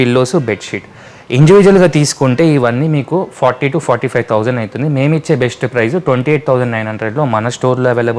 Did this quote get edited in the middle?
no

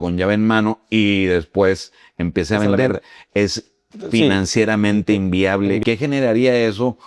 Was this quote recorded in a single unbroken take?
no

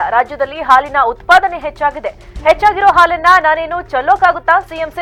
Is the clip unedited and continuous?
yes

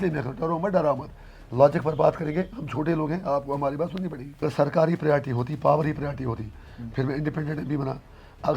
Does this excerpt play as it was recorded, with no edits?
no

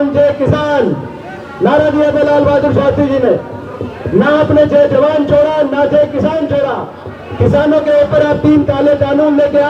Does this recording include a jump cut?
no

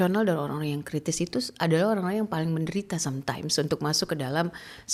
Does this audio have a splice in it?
no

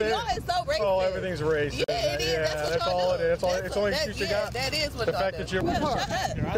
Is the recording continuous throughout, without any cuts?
no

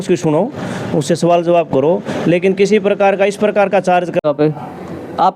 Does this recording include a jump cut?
yes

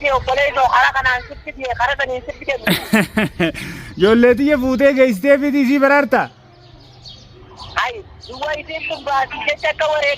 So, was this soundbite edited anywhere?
yes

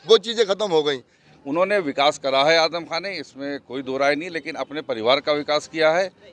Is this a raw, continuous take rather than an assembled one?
no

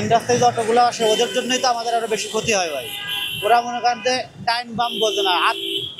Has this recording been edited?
no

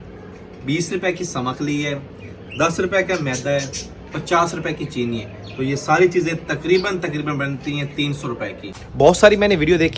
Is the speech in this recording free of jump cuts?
no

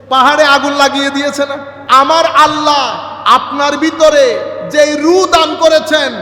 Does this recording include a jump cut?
yes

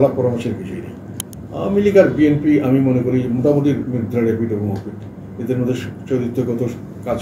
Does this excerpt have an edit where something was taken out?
no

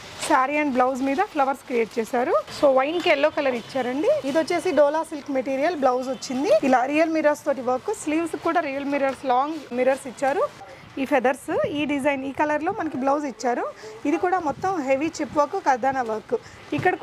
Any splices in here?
yes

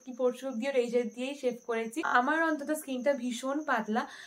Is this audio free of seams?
no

